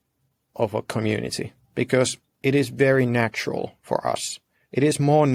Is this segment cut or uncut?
uncut